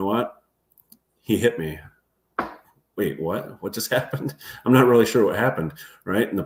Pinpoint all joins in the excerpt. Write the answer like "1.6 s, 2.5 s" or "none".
none